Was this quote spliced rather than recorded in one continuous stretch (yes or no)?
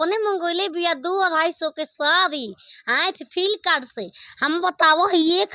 no